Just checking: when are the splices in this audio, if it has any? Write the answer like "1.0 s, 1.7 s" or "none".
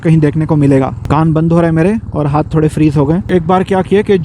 1.0 s, 3.2 s